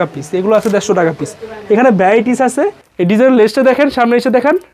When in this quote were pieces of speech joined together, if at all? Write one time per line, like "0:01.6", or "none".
0:02.8